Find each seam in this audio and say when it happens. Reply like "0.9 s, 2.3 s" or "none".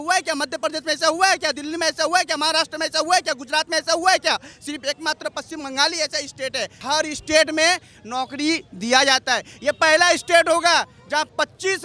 6.8 s